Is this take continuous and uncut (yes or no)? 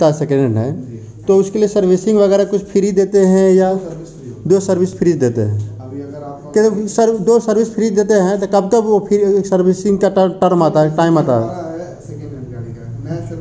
yes